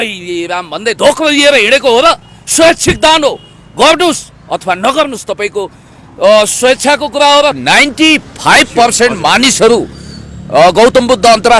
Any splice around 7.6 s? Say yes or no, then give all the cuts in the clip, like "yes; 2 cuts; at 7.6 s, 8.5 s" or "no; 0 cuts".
yes; 1 cut; at 7.6 s